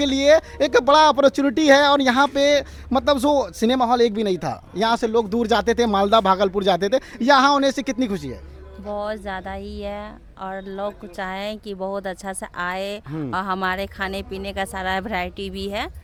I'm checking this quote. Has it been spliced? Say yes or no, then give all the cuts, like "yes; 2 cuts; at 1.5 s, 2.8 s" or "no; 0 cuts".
no; 0 cuts